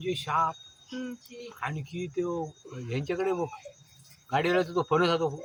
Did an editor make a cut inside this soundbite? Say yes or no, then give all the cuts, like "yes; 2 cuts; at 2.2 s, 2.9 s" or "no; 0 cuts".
no; 0 cuts